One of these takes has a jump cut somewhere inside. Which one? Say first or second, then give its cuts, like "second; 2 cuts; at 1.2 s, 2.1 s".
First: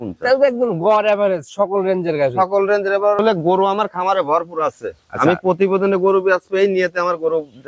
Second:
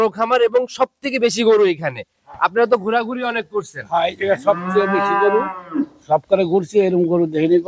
first; 1 cut; at 3.2 s